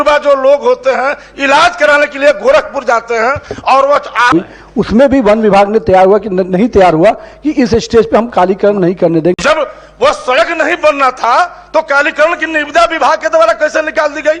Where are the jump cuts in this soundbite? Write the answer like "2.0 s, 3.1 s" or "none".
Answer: 4.3 s, 9.4 s